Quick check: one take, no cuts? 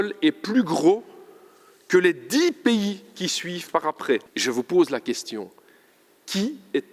no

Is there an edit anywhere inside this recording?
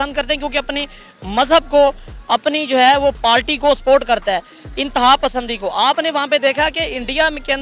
no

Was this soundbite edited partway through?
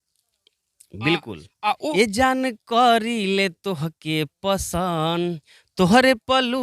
yes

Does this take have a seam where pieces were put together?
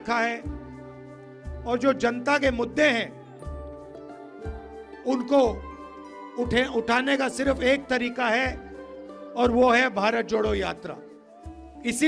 yes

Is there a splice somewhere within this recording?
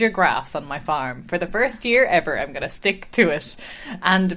no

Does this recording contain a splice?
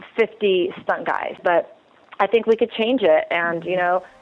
yes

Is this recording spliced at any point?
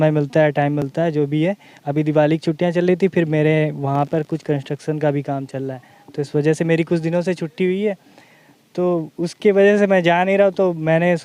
no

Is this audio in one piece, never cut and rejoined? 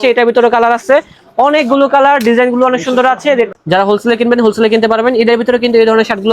no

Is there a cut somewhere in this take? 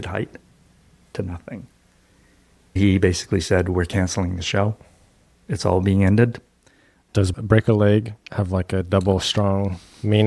yes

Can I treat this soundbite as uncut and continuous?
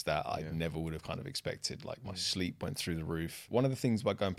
no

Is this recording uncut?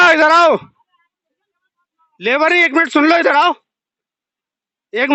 yes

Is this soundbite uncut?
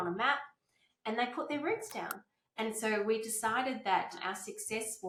yes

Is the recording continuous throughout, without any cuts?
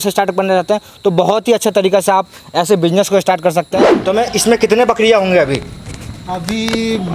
no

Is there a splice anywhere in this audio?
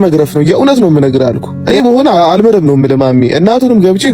yes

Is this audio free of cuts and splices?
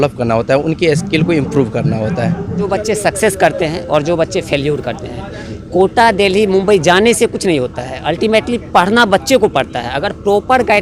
no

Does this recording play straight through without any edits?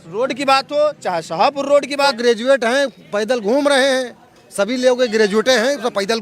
no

